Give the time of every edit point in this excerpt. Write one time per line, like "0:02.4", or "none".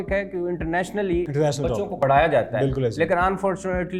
none